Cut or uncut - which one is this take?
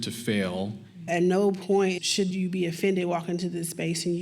cut